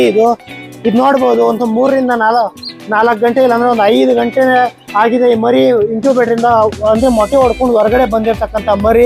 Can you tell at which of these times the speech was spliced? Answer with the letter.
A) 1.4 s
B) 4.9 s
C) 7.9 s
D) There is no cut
D